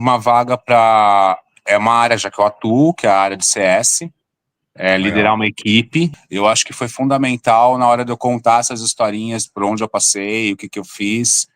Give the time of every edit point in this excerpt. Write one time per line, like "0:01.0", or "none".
0:06.2